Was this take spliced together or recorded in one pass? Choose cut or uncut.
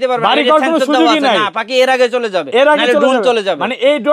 uncut